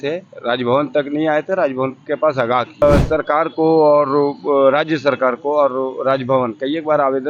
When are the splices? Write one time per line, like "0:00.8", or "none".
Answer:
0:02.8